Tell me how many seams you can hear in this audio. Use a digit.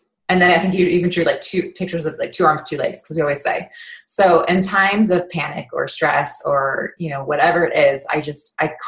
0